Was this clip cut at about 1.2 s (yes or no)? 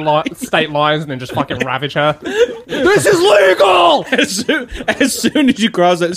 no